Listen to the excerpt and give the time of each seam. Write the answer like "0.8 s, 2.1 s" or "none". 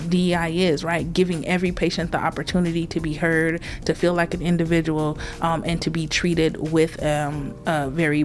none